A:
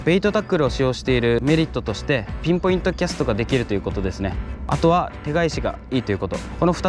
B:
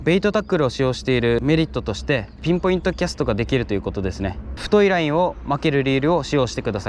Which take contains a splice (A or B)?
B